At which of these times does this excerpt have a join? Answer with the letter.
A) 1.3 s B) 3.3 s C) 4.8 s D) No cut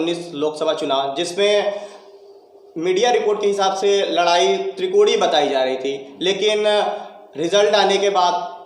D